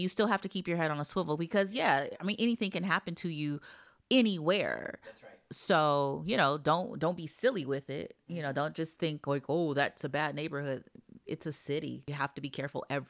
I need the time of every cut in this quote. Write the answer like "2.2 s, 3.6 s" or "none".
12.0 s